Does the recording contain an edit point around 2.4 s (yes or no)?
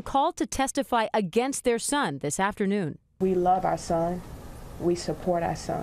yes